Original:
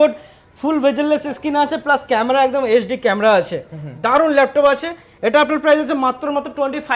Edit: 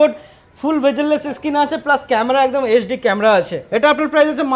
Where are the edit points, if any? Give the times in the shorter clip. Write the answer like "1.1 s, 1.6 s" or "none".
3.6 s